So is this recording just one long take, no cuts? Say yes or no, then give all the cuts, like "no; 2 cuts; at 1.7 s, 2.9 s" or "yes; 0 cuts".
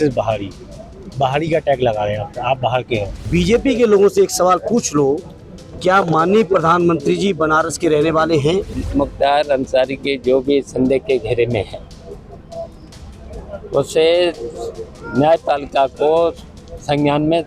no; 2 cuts; at 3.2 s, 8.8 s